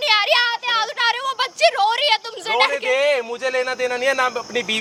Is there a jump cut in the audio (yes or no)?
no